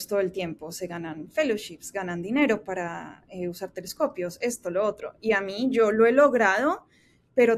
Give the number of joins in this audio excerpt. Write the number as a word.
zero